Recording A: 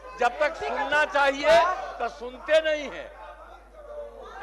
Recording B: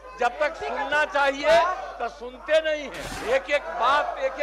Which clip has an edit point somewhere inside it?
B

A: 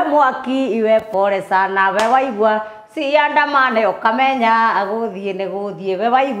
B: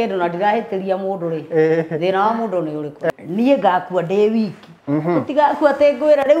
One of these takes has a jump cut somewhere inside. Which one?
B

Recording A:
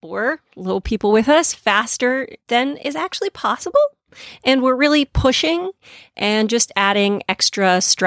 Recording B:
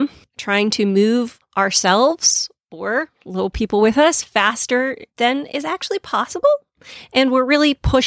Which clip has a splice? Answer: B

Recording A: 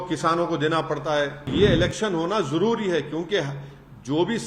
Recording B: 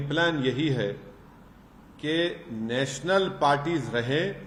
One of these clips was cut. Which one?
A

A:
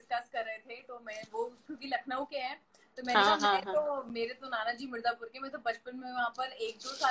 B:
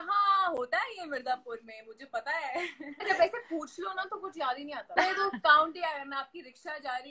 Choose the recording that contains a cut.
B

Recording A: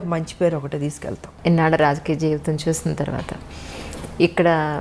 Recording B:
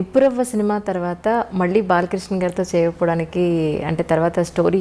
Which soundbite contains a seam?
A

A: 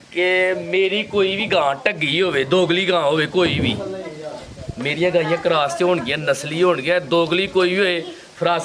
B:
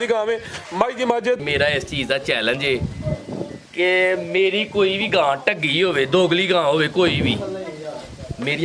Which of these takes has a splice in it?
B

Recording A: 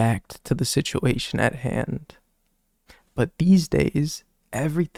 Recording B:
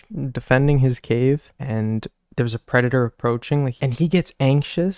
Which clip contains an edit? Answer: B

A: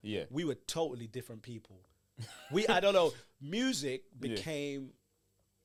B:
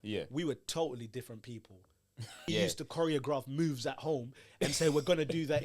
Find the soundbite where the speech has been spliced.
B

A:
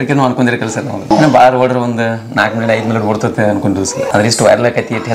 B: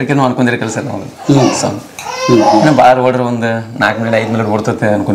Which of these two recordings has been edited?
A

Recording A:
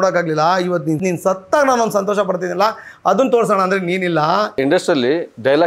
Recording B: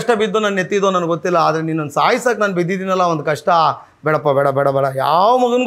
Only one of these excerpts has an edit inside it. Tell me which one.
A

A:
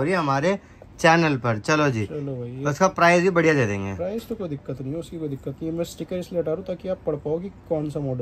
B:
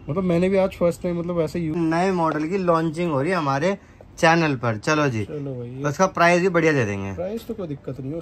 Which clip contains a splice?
B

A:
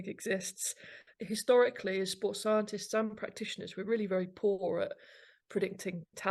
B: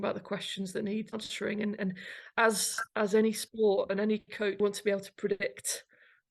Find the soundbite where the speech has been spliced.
B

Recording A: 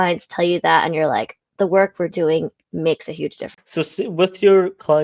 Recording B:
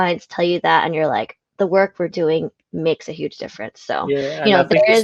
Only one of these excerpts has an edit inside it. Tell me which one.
A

